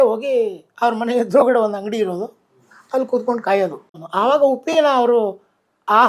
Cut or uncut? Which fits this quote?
cut